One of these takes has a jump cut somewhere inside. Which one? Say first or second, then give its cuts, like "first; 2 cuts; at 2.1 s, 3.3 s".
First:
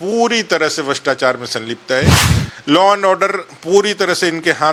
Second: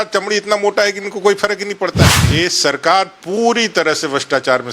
second; 1 cut; at 2.2 s